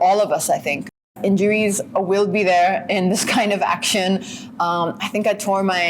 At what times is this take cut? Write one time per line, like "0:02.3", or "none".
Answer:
0:01.1